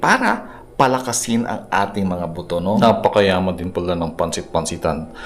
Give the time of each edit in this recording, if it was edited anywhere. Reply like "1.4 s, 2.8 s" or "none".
2.8 s